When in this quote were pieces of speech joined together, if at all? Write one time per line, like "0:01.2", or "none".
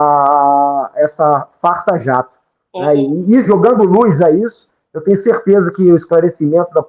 none